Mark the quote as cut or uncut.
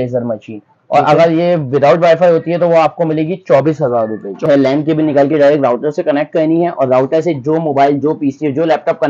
cut